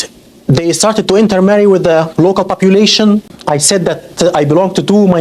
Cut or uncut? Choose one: cut